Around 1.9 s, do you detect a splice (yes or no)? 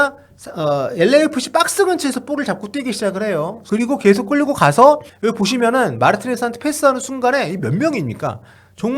no